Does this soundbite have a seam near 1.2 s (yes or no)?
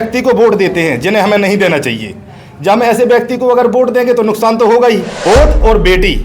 no